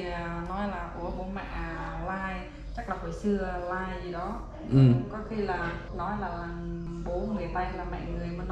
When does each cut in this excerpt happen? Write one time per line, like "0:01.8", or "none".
0:05.9
0:06.9

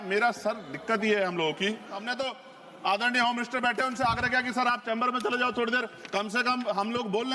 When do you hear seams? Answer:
0:02.0

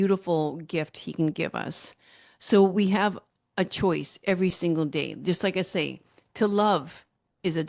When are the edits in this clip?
none

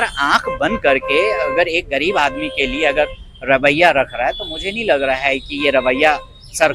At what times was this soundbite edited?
none

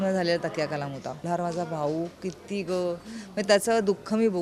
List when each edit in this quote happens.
0:01.2

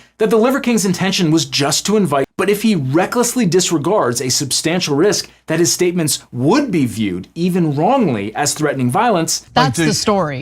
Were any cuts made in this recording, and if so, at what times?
0:02.3
0:09.5

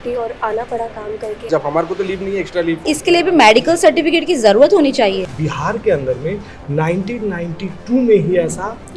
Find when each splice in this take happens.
0:01.5
0:02.8
0:05.3

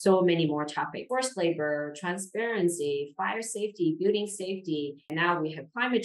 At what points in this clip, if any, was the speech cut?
0:01.0
0:05.1

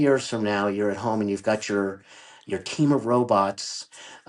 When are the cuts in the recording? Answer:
none

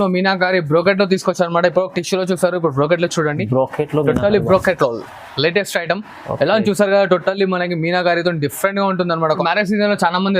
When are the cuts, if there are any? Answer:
0:09.4

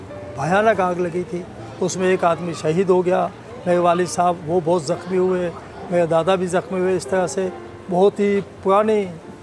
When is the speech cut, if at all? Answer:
none

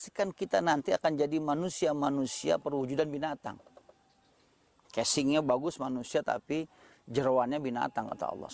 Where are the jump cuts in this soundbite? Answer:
none

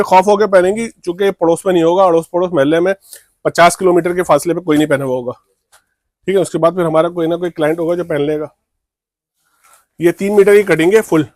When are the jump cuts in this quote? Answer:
none

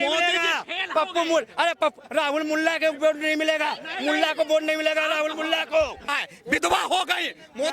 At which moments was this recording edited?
0:06.1

